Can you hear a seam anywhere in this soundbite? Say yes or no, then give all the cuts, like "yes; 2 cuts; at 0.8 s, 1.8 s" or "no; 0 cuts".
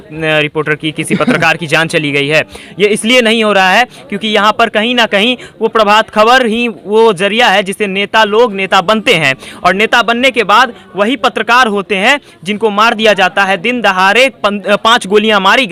no; 0 cuts